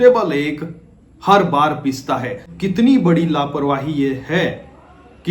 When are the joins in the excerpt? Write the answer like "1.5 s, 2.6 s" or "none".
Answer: 2.5 s